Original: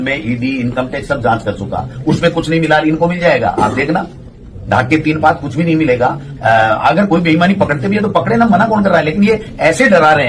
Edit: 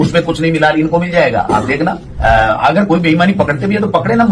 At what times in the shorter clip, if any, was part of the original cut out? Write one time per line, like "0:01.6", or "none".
0:02.1